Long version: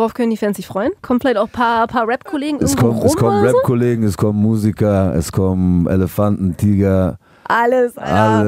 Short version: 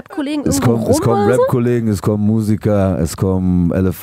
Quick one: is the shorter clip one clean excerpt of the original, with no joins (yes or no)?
yes